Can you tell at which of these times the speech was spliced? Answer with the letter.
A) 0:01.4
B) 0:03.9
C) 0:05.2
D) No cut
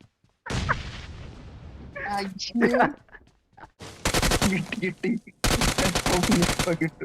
B